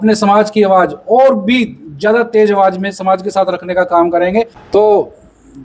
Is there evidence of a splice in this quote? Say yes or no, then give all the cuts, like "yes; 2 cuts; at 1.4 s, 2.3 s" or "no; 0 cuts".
yes; 1 cut; at 4.6 s